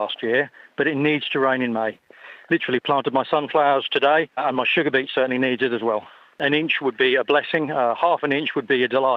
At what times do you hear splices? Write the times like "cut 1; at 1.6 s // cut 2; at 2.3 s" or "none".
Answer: cut 1; at 2.3 s // cut 2; at 4.4 s // cut 3; at 6.4 s // cut 4; at 8.0 s

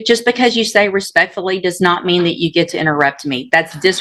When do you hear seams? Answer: none

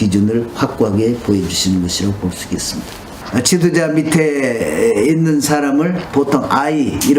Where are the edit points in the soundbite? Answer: cut 1; at 3.2 s

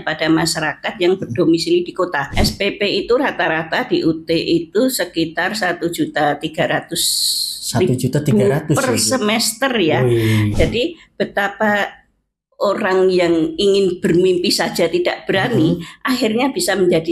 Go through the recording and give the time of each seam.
cut 1; at 2.2 s // cut 2; at 10.5 s

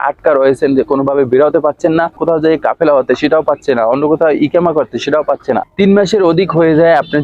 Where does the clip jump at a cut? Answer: cut 1; at 2.2 s // cut 2; at 5.7 s

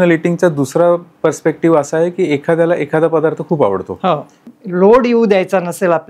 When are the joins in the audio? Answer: cut 1; at 4.4 s

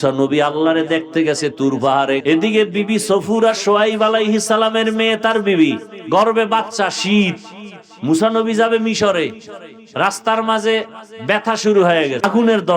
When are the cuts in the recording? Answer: cut 1; at 2.2 s // cut 2; at 5.9 s

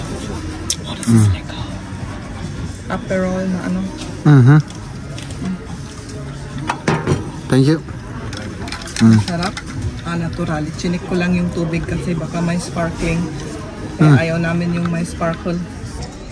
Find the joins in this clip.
none

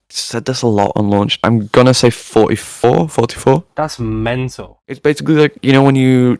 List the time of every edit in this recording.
cut 1; at 5.0 s

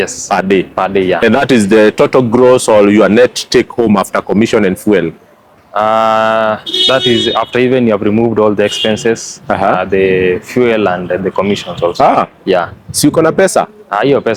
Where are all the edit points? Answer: none

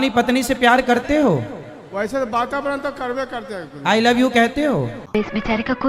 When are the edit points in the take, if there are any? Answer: cut 1; at 5.0 s

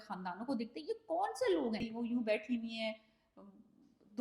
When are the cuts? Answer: cut 1; at 1.9 s

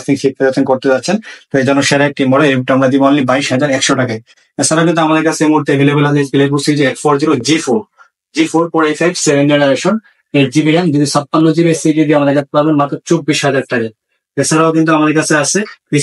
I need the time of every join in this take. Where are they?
none

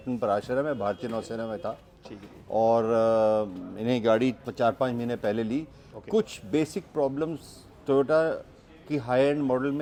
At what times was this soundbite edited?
none

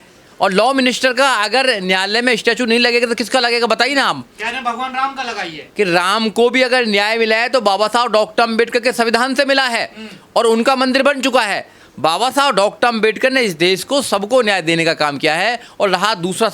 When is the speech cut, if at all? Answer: none

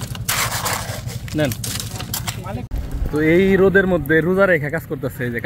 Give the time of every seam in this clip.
cut 1; at 2.7 s

